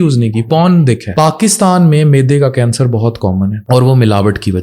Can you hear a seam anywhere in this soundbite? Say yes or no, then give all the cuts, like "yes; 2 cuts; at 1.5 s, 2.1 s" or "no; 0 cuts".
yes; 2 cuts; at 1.0 s, 3.6 s